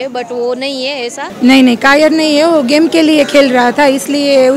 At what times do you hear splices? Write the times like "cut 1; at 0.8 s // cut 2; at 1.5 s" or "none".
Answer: cut 1; at 1.3 s